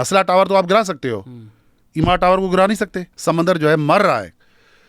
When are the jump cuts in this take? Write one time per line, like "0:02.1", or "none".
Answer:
0:03.1